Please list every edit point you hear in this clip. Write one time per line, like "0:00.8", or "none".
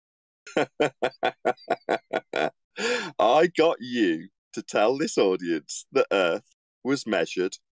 none